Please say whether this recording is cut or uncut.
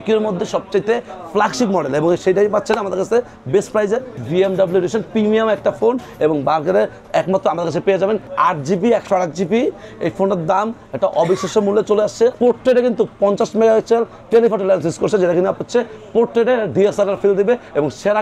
cut